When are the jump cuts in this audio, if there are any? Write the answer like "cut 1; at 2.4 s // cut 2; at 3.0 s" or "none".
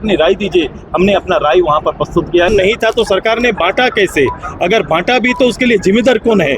cut 1; at 2.5 s